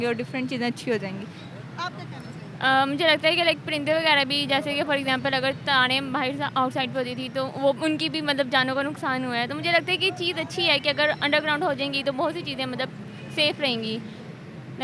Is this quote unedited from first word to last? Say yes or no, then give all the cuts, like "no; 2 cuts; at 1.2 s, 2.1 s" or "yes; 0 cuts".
yes; 0 cuts